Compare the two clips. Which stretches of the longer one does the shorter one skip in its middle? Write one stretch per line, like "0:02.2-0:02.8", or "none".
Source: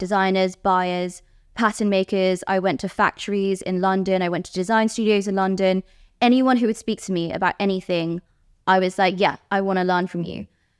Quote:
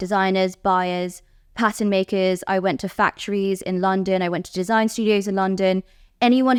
none